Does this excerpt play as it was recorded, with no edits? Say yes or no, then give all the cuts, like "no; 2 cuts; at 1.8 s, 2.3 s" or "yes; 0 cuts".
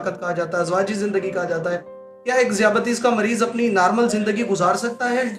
yes; 0 cuts